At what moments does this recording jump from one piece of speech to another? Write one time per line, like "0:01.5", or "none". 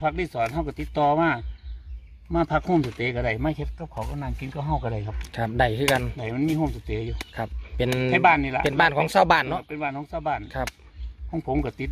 none